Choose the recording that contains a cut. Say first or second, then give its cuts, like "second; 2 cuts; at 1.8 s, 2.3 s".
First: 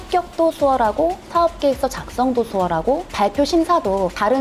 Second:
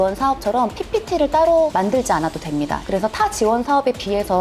second; 1 cut; at 2.8 s